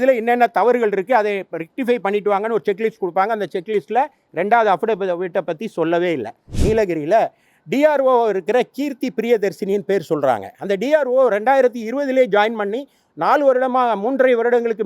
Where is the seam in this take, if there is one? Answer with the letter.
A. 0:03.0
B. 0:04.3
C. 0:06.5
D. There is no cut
C